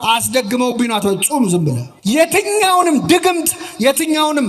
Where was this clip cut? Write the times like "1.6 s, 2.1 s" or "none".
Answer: 1.9 s